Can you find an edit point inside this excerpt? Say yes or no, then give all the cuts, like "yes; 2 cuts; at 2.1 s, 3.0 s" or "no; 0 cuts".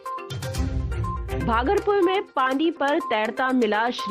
yes; 1 cut; at 1.4 s